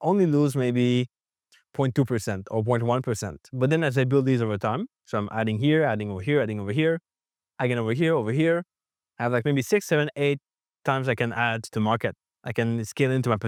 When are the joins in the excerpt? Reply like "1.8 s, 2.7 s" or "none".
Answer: none